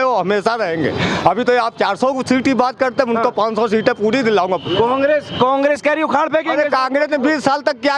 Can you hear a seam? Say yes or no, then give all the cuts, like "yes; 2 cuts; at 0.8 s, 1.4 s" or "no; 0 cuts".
no; 0 cuts